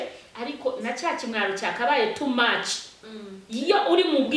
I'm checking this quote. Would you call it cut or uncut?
uncut